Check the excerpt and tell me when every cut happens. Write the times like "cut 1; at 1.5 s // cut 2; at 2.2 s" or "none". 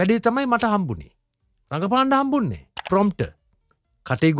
cut 1; at 2.7 s